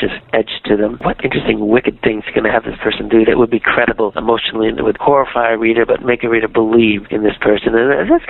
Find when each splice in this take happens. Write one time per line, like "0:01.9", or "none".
0:01.0